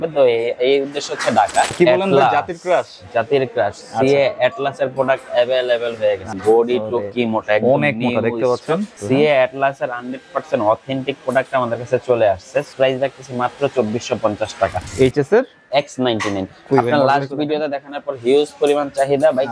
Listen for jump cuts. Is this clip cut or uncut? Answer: cut